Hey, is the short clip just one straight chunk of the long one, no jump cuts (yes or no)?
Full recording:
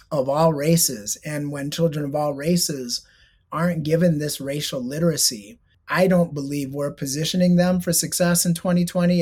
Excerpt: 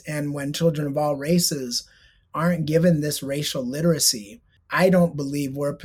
yes